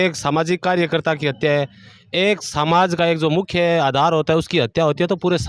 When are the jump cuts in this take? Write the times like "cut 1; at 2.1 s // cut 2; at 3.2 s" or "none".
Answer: none